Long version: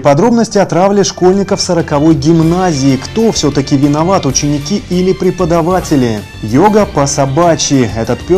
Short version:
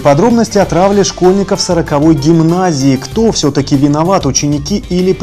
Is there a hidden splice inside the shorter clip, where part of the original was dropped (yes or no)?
no